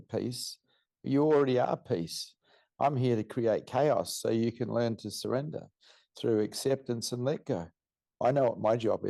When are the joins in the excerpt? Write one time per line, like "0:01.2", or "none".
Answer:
0:08.1

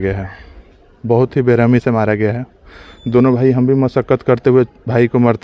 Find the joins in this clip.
none

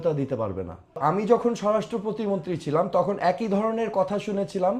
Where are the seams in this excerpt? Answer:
0:01.0

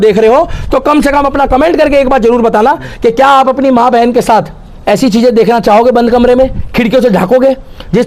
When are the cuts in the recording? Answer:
none

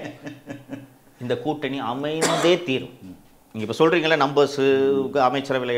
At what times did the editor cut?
none

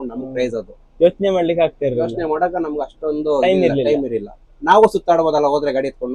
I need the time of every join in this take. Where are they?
none

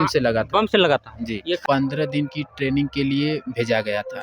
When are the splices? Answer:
0:01.6

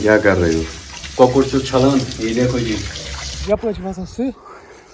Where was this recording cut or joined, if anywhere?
0:03.3

